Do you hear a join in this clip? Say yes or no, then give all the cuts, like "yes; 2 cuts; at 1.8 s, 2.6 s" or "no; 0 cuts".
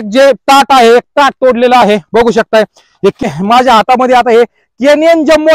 yes; 1 cut; at 3.2 s